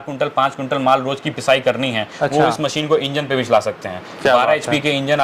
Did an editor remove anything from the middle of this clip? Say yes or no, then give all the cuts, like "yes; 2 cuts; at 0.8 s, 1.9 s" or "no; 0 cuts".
no; 0 cuts